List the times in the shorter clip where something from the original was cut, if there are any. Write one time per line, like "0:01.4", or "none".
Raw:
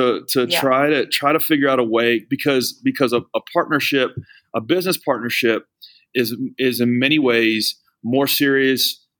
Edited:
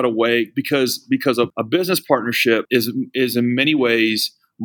0:01.5
0:02.7